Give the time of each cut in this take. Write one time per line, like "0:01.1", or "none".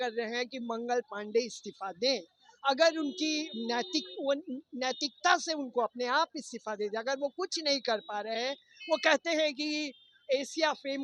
none